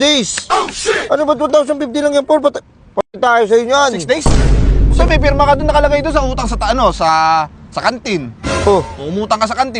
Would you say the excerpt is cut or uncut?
uncut